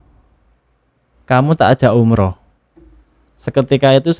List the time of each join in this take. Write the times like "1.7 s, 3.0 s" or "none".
none

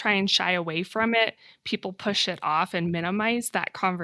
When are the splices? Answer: none

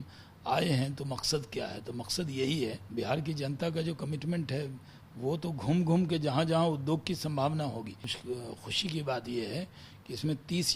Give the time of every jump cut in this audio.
2.8 s, 8.1 s

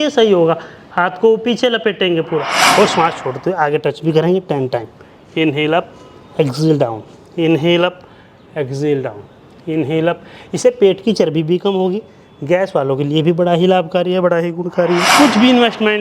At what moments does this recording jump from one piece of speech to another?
2.6 s, 15.1 s

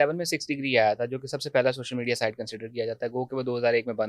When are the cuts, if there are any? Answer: none

